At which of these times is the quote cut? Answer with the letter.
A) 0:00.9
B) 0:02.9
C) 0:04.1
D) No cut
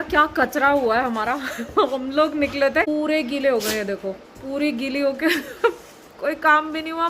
B